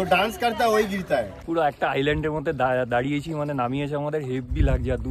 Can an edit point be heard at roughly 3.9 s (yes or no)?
no